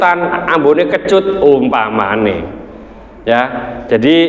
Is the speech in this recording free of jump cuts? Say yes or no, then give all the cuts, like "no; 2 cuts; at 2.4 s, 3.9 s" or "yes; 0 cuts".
yes; 0 cuts